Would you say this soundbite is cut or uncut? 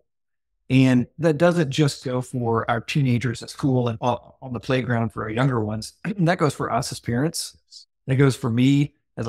cut